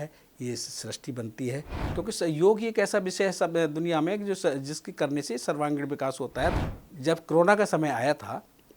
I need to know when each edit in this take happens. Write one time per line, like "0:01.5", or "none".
0:01.8
0:06.6